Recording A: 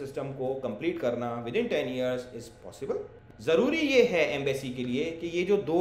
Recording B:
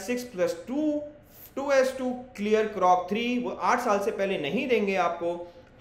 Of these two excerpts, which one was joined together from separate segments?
A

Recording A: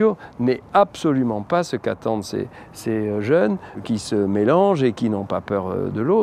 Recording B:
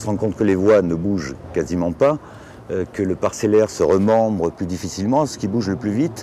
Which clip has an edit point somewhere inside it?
A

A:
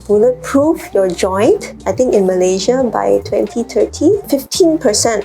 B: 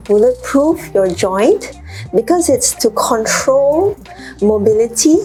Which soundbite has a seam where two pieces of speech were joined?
A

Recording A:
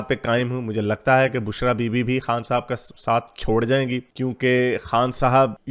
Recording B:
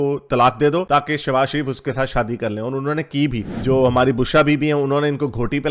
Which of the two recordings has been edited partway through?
B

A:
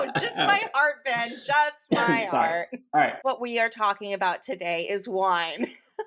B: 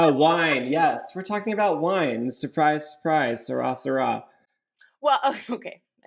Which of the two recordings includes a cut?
A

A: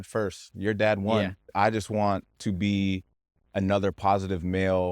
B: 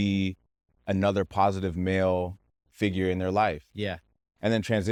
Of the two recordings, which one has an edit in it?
A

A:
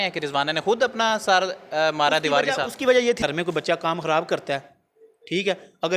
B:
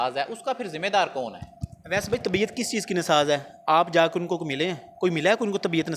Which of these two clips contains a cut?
A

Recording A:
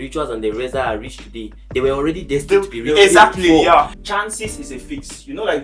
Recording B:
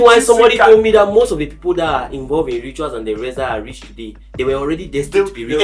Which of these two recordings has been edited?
A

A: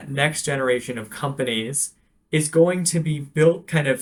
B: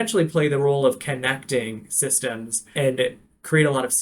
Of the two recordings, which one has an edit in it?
B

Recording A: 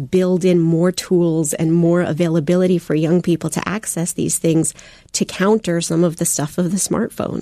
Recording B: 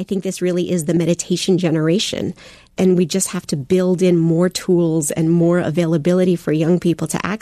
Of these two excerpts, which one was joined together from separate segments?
B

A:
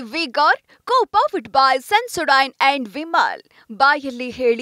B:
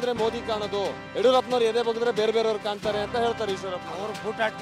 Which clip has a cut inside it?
B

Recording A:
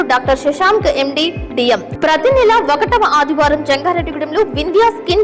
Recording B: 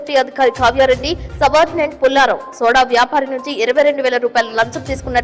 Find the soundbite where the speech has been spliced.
A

